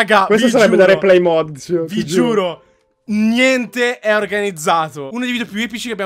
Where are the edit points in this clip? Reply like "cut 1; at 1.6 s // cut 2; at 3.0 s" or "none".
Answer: cut 1; at 5.1 s